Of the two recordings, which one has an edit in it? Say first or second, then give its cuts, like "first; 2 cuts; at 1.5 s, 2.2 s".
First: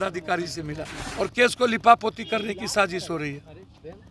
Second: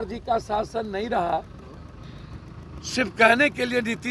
first; 1 cut; at 1.0 s